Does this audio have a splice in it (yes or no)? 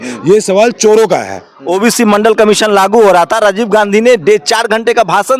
yes